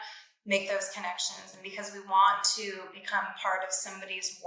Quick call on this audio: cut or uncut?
uncut